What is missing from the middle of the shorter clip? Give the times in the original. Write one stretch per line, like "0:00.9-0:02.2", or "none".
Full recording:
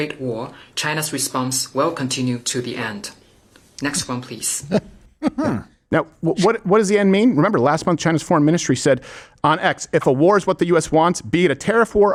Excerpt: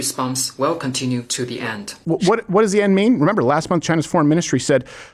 0:03.1-0:06.1